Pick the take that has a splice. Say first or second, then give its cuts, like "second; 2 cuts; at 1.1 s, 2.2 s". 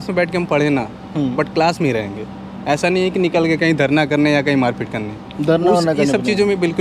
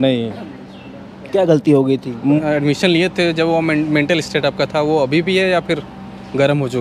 second; 1 cut; at 2.4 s